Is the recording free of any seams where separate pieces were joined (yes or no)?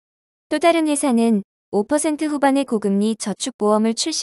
no